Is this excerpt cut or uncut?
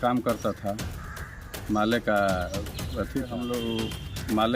cut